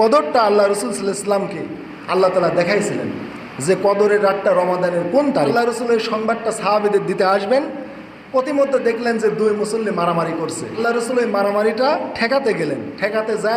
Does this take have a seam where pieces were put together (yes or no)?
yes